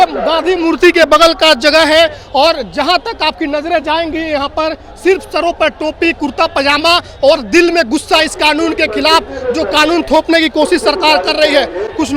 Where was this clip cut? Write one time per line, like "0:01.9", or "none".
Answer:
none

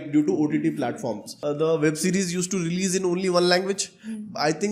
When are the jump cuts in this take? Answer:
0:01.3

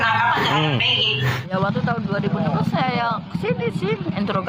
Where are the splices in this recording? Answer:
0:01.5

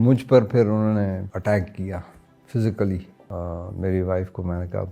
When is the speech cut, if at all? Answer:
0:01.3
0:03.2

